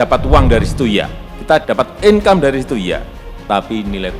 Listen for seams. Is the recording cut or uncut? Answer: uncut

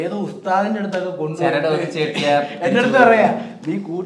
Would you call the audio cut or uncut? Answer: uncut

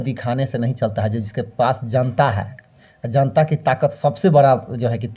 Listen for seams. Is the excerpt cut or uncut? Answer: uncut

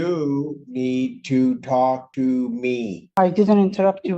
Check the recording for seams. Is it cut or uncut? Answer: cut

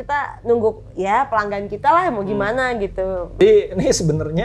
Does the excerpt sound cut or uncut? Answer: cut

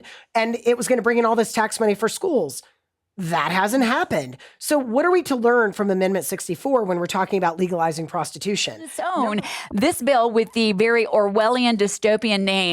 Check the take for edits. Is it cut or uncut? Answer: cut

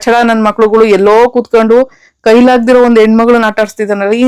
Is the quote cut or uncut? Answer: uncut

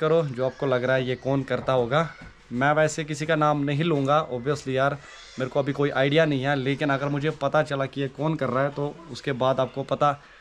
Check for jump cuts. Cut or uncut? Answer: uncut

